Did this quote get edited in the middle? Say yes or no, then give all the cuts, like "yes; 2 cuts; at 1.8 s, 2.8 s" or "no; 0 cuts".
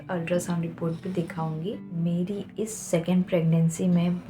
yes; 1 cut; at 1.8 s